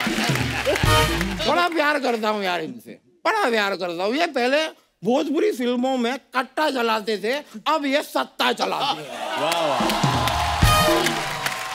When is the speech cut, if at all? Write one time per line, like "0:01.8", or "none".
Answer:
0:01.4